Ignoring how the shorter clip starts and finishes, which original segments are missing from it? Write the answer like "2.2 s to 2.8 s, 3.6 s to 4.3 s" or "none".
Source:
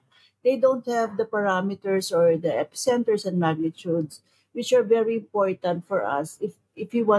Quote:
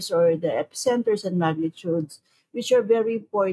none